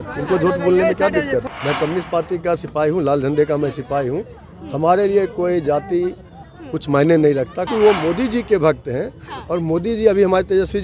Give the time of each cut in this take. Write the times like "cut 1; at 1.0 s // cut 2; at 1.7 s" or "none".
cut 1; at 1.5 s // cut 2; at 7.7 s

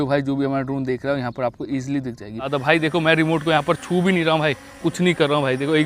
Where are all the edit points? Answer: cut 1; at 2.5 s

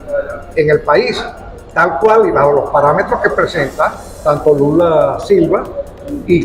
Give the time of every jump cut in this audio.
none

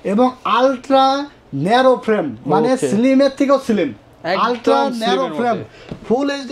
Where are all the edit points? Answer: none

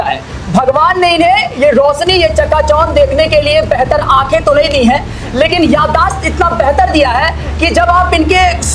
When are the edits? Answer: none

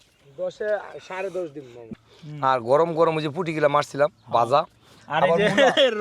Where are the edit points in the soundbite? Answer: cut 1; at 1.9 s

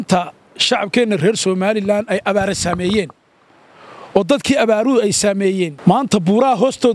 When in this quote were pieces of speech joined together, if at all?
cut 1; at 5.7 s

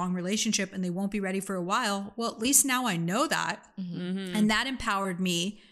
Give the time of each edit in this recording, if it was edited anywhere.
none

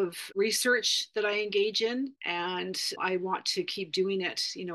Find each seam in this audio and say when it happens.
cut 1; at 3.0 s

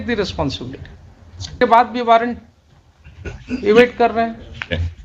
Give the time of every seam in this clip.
cut 1; at 1.6 s

